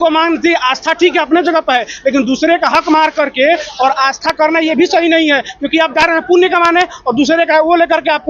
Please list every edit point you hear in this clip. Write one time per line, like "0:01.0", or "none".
none